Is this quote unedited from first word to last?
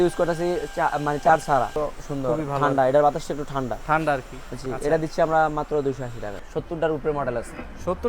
no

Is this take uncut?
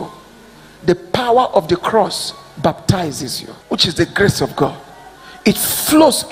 no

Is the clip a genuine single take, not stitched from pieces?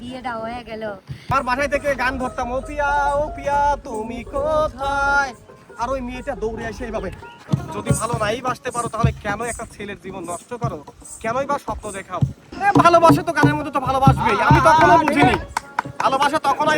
no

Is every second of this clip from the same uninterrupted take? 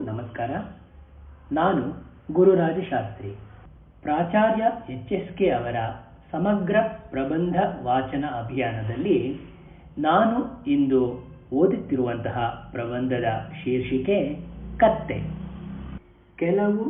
no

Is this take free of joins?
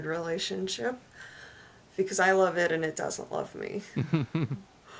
yes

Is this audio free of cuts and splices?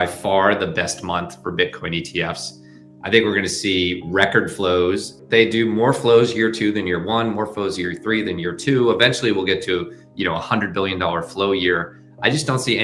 no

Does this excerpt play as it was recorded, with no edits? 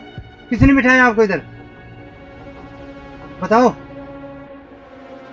yes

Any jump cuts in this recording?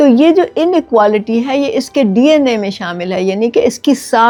no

